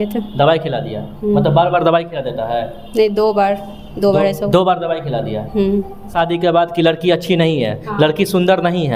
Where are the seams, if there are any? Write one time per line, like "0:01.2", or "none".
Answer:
0:06.1

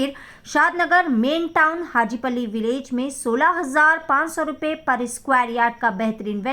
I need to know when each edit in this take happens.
none

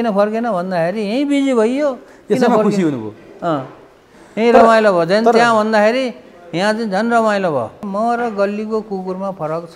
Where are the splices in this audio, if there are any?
0:07.8

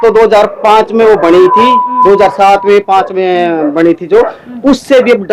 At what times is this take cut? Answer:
none

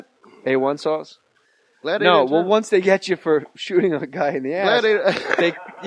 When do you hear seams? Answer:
none

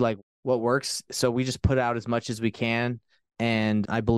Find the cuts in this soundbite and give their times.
none

